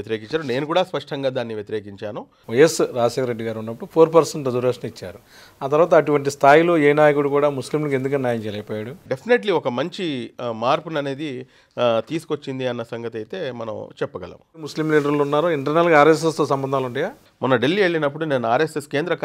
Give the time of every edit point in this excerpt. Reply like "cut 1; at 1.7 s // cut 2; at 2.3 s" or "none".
cut 1; at 2.3 s // cut 2; at 9.0 s // cut 3; at 14.7 s // cut 4; at 17.2 s